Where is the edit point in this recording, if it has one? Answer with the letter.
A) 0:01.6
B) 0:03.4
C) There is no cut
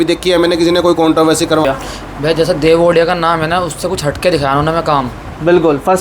A